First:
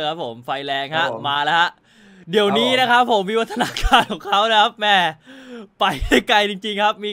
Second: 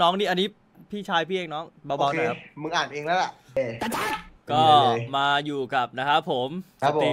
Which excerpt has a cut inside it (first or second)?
second